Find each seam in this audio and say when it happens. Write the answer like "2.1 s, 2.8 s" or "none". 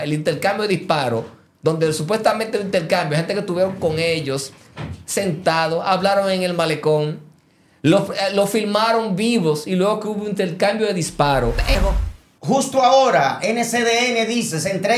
11.8 s